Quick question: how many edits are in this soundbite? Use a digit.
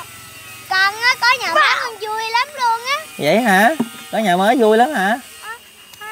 0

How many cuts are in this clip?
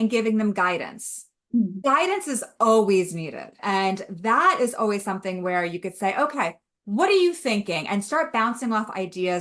2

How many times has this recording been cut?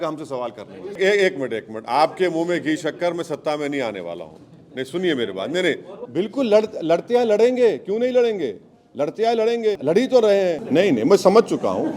4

